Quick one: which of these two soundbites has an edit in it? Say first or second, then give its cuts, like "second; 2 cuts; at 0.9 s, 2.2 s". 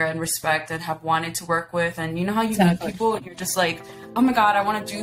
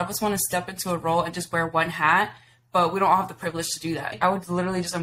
second; 1 cut; at 4.1 s